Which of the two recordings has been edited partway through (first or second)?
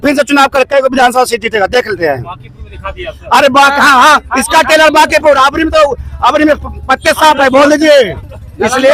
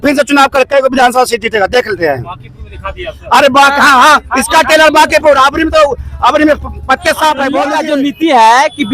second